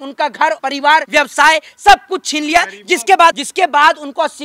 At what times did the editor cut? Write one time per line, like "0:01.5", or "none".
0:00.9
0:03.4